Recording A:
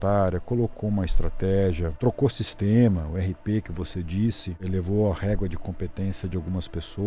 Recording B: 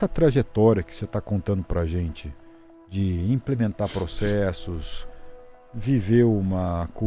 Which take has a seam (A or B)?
A